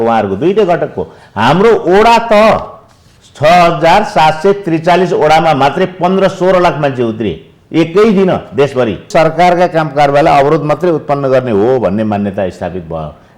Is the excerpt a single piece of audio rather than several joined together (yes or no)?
no